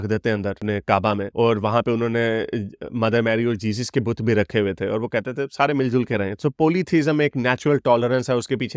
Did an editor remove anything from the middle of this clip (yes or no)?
no